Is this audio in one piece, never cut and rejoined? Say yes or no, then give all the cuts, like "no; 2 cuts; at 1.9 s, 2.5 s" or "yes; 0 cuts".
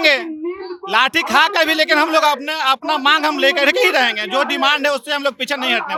yes; 0 cuts